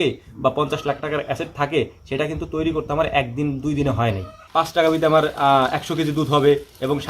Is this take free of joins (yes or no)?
no